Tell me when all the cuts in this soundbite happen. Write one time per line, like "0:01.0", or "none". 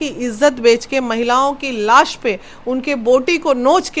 none